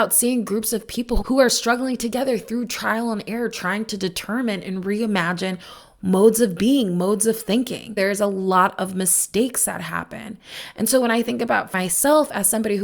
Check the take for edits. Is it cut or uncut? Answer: cut